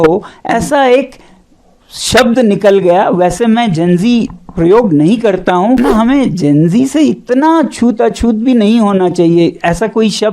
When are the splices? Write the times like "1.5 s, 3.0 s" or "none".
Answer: 5.8 s